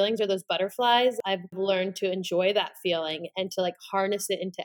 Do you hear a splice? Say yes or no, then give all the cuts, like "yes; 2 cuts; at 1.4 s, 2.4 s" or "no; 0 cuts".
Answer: yes; 1 cut; at 1.4 s